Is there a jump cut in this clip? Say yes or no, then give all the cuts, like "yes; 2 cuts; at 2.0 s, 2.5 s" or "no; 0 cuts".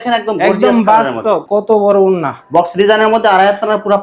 yes; 1 cut; at 1.4 s